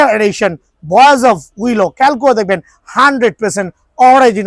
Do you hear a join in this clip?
no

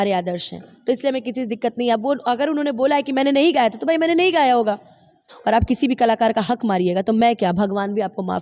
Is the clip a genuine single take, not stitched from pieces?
no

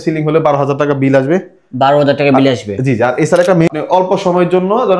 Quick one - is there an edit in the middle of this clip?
yes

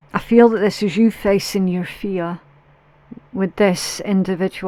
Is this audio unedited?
yes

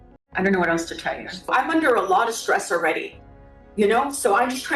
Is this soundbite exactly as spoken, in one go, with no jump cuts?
no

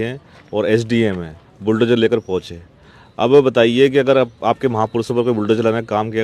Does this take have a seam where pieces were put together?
no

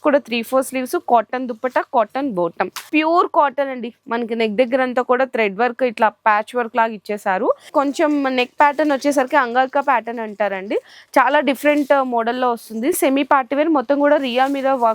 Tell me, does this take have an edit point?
yes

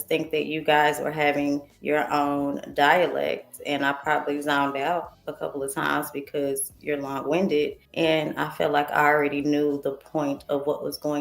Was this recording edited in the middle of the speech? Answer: yes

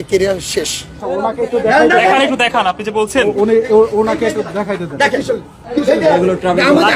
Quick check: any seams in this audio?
yes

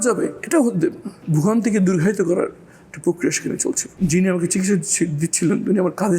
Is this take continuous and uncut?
no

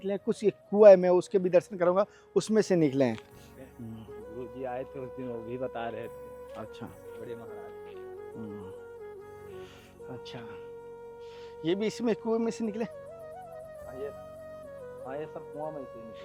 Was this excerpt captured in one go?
yes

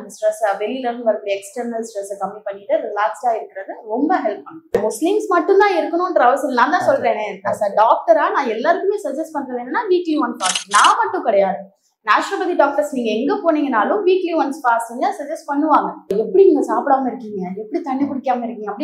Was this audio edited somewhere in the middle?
yes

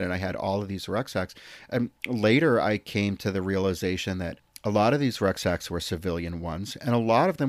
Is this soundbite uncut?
no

